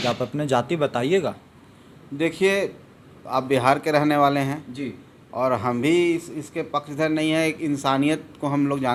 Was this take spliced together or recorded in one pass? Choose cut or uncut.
uncut